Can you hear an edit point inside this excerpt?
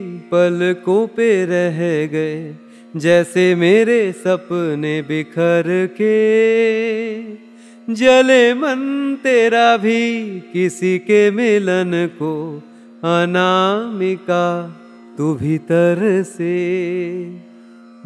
no; 0 cuts

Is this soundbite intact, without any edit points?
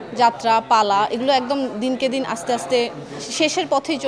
yes; 0 cuts

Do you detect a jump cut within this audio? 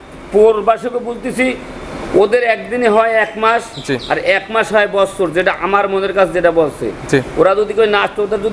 no; 0 cuts

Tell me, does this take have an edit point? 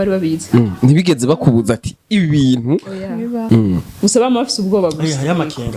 yes; 1 cut; at 3.4 s

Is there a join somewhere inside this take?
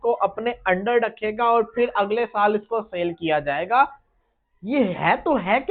no; 0 cuts

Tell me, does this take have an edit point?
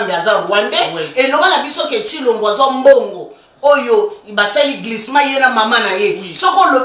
no; 0 cuts

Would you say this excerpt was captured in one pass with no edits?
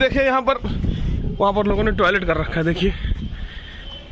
no; 1 cut; at 1.2 s

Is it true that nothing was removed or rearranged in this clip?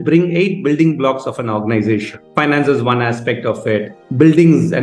yes; 0 cuts

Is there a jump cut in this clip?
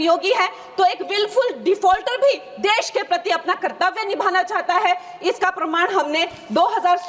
no; 0 cuts

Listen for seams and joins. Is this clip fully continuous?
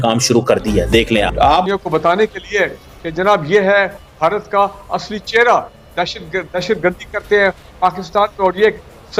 yes; 0 cuts

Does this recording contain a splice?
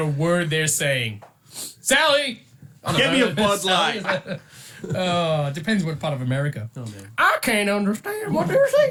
no; 0 cuts

